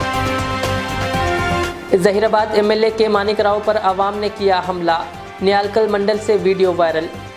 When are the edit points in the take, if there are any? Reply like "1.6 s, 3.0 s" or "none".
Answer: 1.6 s